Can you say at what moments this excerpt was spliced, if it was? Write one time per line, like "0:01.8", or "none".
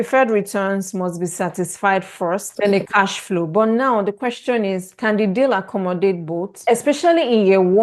0:02.5
0:06.5